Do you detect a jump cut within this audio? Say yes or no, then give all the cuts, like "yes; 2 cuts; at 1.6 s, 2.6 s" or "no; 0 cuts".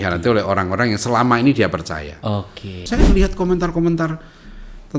yes; 1 cut; at 2.8 s